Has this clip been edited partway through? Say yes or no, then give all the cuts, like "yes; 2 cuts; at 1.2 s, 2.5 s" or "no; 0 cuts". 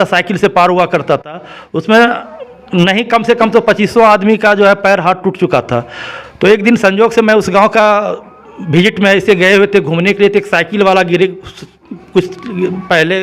no; 0 cuts